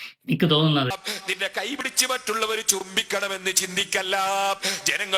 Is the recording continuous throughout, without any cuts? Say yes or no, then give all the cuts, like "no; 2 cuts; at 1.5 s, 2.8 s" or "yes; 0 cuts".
no; 1 cut; at 1.1 s